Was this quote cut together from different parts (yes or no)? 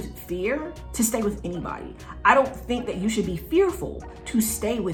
no